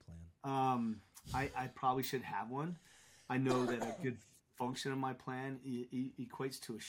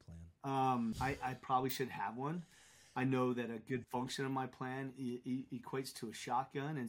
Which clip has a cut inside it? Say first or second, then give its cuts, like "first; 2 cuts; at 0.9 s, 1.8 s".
second; 2 cuts; at 1.0 s, 3.9 s